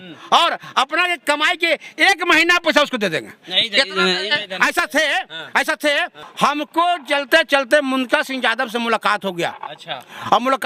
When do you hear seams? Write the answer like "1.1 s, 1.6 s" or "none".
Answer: none